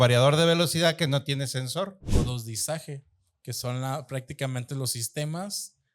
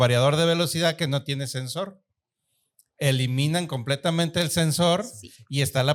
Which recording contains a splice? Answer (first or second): first